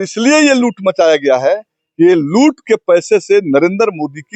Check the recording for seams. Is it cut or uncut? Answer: uncut